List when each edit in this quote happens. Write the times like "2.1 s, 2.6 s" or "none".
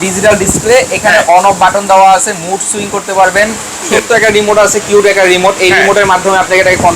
3.9 s